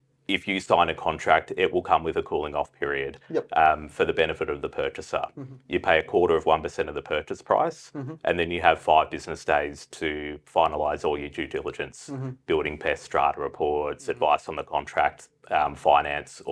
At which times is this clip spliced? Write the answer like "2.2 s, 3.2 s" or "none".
none

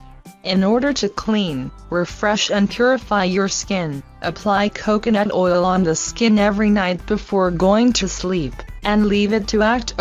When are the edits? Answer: none

